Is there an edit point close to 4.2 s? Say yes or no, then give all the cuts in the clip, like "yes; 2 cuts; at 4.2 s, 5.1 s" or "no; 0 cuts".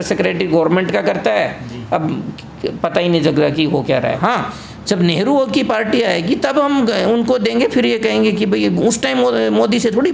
yes; 1 cut; at 4.2 s